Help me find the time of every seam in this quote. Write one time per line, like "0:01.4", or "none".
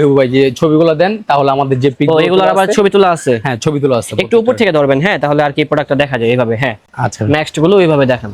none